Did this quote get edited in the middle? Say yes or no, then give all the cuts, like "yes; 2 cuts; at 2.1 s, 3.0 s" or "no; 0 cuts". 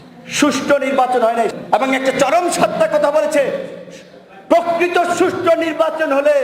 yes; 1 cut; at 1.5 s